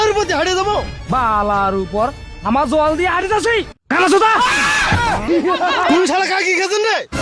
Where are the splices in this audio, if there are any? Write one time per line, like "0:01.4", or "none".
0:05.3

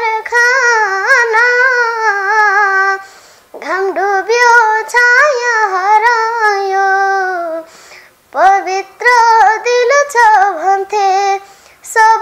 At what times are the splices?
none

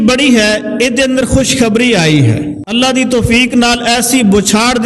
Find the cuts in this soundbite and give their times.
0:02.6

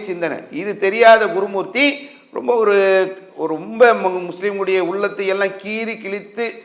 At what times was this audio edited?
none

